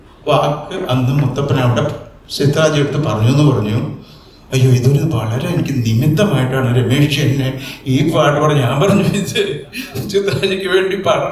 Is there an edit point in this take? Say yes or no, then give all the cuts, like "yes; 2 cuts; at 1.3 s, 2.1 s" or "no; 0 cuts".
no; 0 cuts